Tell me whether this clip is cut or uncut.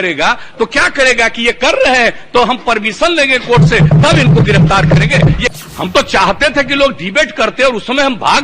cut